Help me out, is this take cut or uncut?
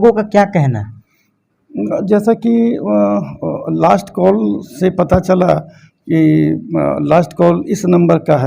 uncut